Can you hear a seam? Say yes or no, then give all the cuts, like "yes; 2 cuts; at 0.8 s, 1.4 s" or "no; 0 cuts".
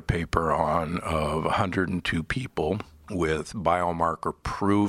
yes; 1 cut; at 3.0 s